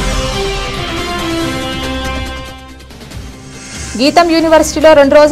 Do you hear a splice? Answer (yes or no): yes